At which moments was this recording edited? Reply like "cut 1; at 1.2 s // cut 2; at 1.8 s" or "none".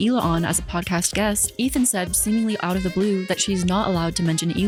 none